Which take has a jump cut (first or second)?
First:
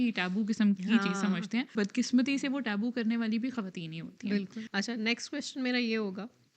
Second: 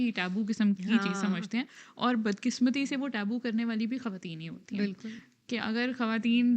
first